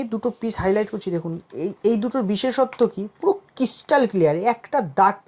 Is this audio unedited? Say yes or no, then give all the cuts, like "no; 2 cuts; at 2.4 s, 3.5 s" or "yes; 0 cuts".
yes; 0 cuts